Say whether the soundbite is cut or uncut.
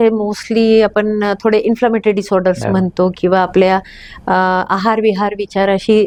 uncut